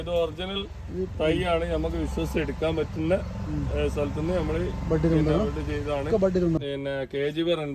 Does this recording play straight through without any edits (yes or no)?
no